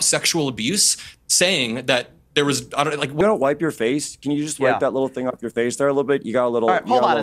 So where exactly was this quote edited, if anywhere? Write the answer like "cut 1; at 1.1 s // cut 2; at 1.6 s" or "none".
cut 1; at 3.2 s

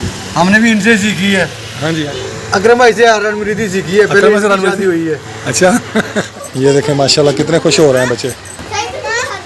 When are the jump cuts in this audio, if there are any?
cut 1; at 2.1 s // cut 2; at 6.4 s

